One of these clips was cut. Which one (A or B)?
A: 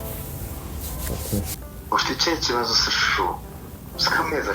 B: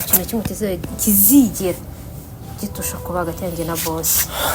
A